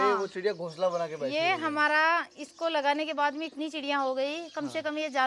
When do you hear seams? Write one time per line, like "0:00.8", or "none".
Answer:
none